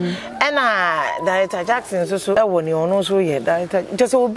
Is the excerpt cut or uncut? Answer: cut